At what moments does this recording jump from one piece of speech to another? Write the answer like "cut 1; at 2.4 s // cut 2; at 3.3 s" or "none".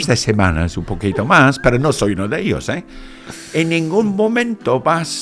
none

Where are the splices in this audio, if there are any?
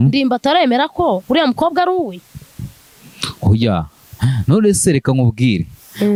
none

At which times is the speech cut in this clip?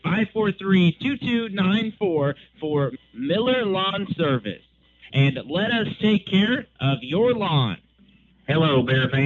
cut 1; at 8.1 s

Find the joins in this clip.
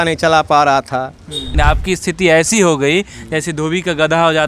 cut 1; at 1.5 s

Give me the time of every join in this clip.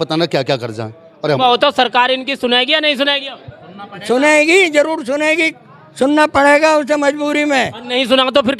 cut 1; at 1.4 s

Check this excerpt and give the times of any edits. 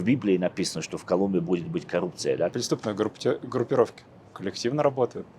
cut 1; at 2.5 s

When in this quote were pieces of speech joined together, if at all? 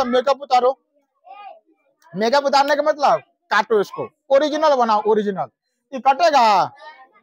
none

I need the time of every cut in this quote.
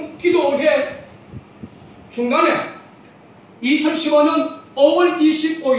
cut 1; at 1.9 s

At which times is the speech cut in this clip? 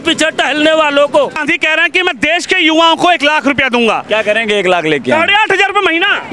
cut 1; at 1.4 s

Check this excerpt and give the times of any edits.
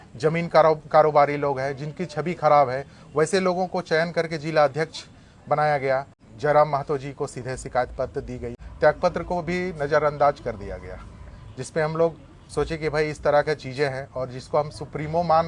cut 1; at 6.2 s // cut 2; at 8.6 s

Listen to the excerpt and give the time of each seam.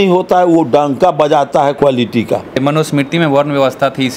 cut 1; at 1.8 s // cut 2; at 2.6 s

